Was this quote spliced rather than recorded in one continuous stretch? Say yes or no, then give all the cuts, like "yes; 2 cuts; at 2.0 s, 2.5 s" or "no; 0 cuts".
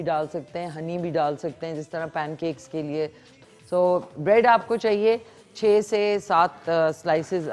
yes; 1 cut; at 3.3 s